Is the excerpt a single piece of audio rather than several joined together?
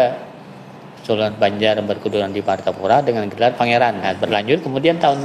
no; 1 cut; at 4.0 s

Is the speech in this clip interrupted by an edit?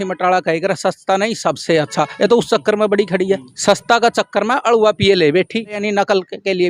yes; 2 cuts; at 3.5 s, 5.8 s

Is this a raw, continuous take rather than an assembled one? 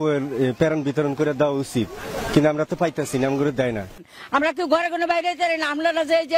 no; 1 cut; at 4.1 s

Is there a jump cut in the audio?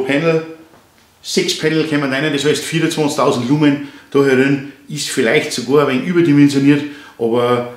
no; 0 cuts

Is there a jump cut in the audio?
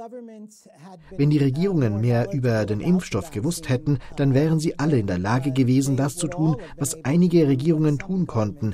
yes; 1 cut; at 1.0 s

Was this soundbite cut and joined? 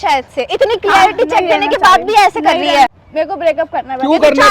yes; 1 cut; at 2.9 s

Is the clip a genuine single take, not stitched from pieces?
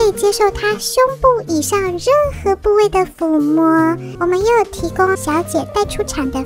no; 2 cuts; at 4.1 s, 5.2 s

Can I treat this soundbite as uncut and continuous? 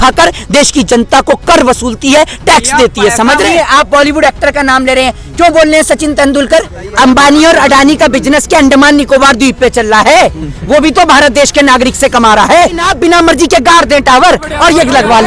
no; 3 cuts; at 3.5 s, 6.8 s, 12.9 s

